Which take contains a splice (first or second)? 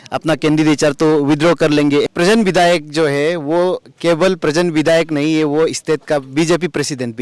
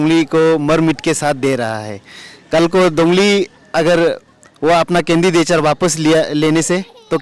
first